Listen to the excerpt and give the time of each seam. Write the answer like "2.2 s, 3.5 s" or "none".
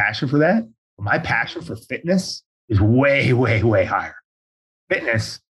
4.4 s